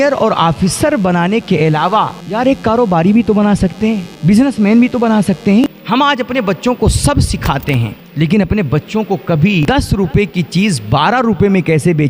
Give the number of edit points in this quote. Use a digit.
5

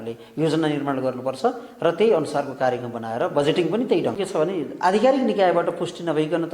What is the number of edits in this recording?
1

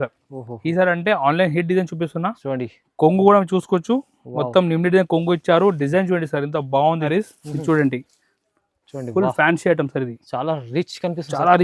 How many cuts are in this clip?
1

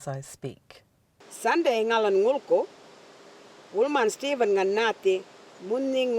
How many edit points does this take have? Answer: 1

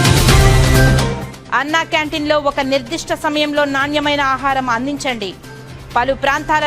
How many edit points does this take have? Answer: 1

